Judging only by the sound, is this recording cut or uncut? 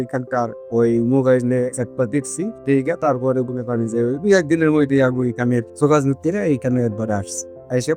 uncut